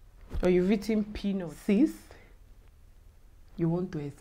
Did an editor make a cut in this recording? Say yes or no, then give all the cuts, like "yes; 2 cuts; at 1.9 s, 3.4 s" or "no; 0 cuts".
yes; 1 cut; at 1.2 s